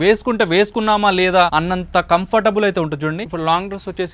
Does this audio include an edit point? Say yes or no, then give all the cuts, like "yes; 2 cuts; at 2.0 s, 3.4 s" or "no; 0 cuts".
yes; 2 cuts; at 1.5 s, 3.3 s